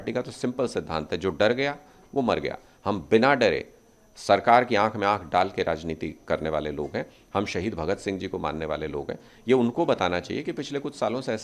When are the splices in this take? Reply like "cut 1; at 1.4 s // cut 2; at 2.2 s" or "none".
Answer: none